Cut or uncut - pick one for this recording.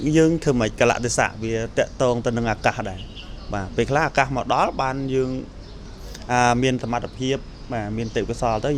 uncut